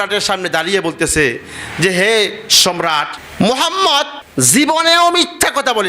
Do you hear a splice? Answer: yes; 1 cut; at 4.2 s

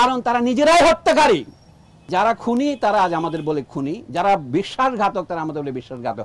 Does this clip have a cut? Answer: yes; 1 cut; at 2.1 s

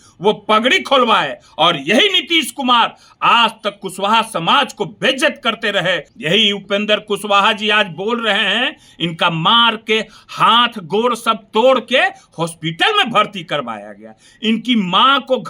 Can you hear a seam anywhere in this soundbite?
yes; 1 cut; at 6.1 s

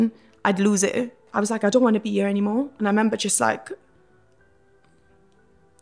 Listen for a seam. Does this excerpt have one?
yes; 1 cut; at 1.2 s

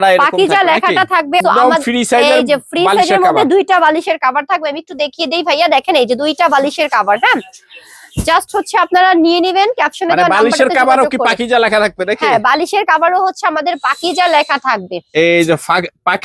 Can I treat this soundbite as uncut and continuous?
no; 1 cut; at 1.4 s

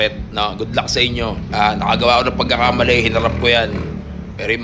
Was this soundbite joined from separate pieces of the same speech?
yes; 1 cut; at 1.5 s

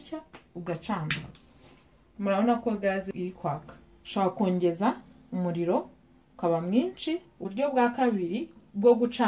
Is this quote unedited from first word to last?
no; 2 cuts; at 3.1 s, 7.5 s

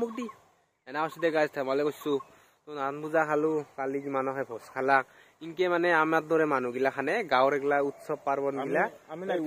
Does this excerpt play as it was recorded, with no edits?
yes; 0 cuts

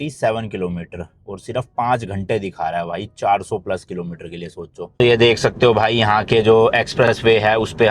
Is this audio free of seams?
no; 1 cut; at 5.0 s

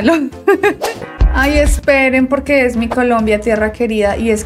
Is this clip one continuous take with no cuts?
no; 1 cut; at 1.0 s

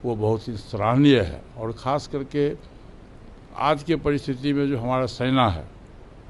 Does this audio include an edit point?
no; 0 cuts

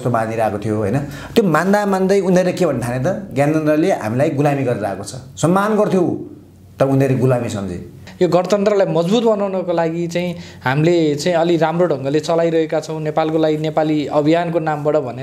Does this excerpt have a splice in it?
yes; 1 cut; at 8.0 s

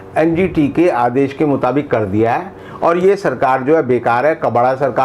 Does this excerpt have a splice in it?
no; 0 cuts

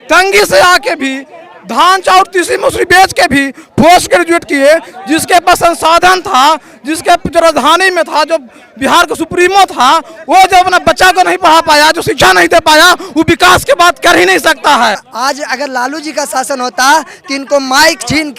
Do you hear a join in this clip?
yes; 1 cut; at 15.1 s

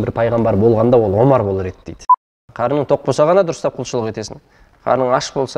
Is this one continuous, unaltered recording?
no; 1 cut; at 2.4 s

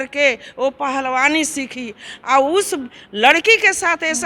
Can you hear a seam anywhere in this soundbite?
no; 0 cuts

